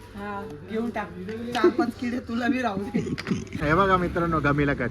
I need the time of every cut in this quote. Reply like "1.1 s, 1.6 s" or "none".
3.6 s

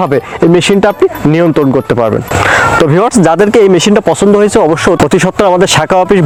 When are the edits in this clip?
none

